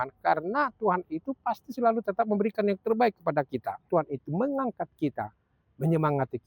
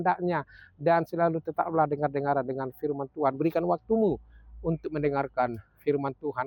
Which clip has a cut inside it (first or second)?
first